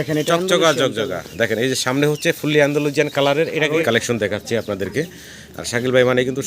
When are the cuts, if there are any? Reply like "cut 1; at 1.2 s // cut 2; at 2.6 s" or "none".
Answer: cut 1; at 3.8 s